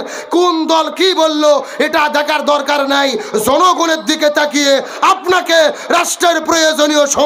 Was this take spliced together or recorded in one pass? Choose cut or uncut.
uncut